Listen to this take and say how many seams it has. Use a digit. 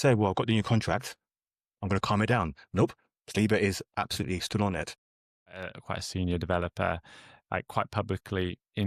1